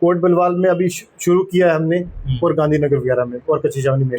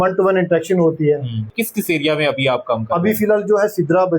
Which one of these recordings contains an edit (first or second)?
second